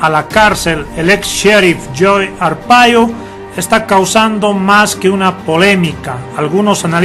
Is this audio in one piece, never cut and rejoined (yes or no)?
no